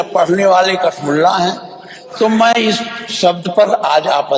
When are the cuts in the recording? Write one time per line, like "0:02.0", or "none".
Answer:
none